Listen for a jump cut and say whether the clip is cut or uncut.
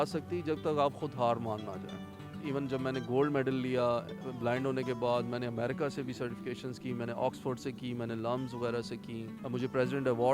uncut